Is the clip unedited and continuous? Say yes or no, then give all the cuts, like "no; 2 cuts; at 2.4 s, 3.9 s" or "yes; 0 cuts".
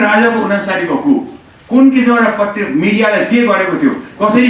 yes; 0 cuts